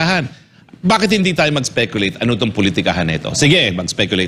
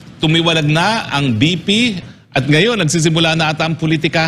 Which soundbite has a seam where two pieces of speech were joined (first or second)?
second